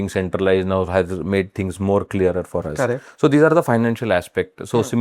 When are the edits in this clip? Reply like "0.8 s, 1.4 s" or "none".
none